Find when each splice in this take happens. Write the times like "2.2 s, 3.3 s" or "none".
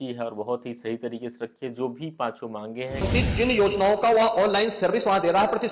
3.1 s